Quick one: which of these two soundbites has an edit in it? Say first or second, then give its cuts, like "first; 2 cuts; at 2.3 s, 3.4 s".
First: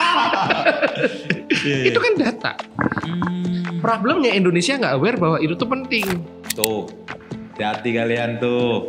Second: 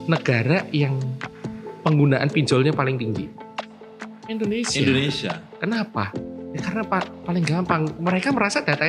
first; 1 cut; at 6.3 s